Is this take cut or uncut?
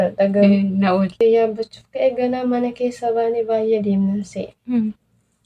cut